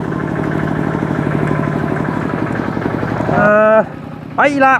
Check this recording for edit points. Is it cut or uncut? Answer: cut